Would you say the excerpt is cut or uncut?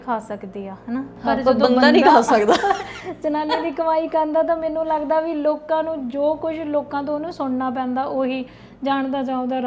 uncut